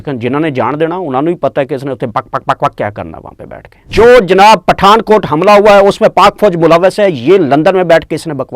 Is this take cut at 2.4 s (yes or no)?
no